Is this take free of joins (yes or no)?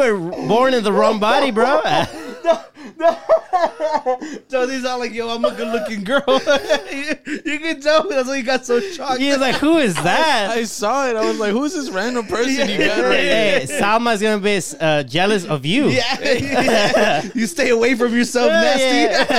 yes